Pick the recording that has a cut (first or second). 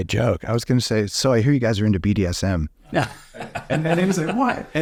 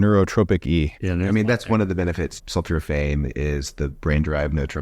second